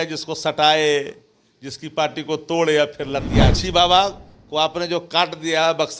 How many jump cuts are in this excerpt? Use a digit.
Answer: 1